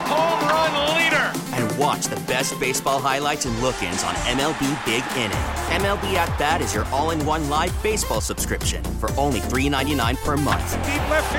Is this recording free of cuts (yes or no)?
yes